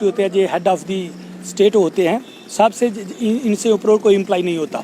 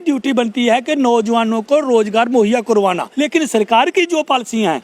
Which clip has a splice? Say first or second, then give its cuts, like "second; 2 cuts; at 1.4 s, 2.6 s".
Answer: second; 1 cut; at 3.1 s